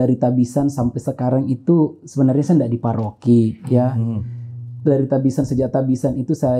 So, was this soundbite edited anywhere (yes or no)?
no